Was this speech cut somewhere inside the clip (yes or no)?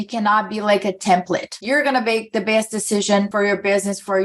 yes